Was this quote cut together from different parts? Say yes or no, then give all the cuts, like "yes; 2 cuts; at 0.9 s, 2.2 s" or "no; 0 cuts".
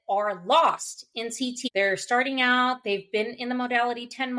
yes; 1 cut; at 1.6 s